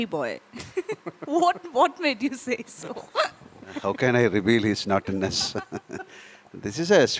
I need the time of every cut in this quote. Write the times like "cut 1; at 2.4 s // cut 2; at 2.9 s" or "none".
none